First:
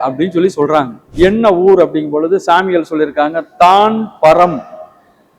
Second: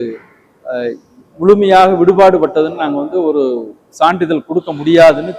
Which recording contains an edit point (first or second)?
first